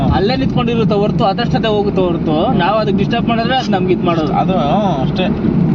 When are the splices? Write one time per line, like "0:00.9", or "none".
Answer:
none